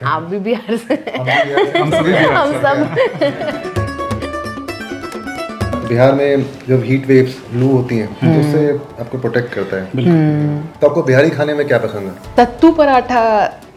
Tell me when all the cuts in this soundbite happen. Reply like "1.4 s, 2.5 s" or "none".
none